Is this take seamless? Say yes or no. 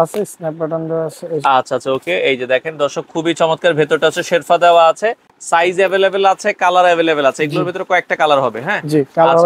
yes